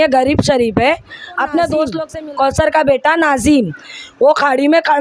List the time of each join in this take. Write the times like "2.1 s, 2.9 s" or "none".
2.1 s